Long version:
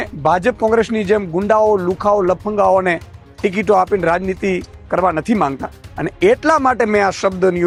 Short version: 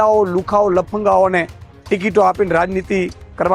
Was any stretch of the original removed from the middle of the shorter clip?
no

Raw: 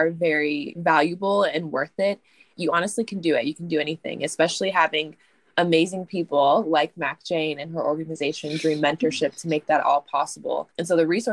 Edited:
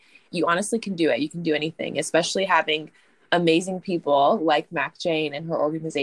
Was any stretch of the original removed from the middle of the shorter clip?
no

